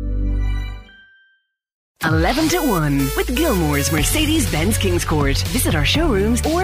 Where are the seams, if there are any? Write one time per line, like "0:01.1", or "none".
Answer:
0:02.0